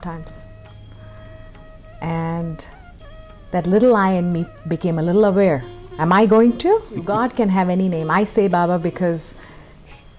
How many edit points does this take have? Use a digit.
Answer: 1